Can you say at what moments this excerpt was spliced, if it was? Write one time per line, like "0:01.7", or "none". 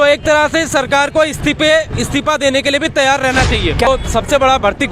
0:03.9